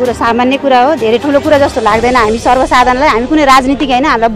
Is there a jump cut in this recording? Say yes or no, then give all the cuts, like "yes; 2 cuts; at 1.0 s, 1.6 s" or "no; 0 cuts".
no; 0 cuts